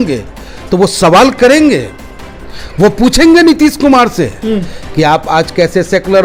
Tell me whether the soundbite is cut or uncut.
uncut